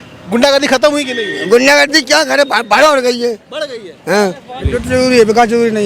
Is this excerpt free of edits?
no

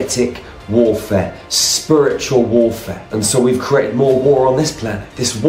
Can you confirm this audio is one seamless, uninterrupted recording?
no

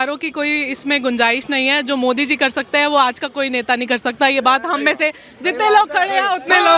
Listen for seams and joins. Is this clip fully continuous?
yes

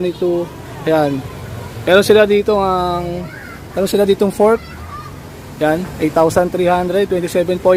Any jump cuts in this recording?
no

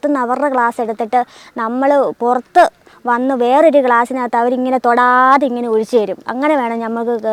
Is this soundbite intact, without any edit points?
yes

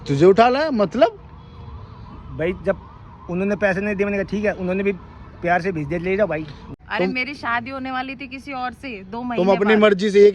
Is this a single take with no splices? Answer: no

